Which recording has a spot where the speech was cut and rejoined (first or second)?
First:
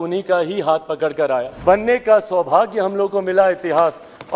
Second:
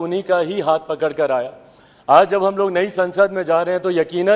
first